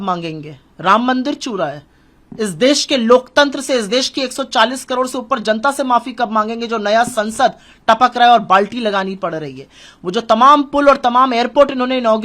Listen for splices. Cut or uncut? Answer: uncut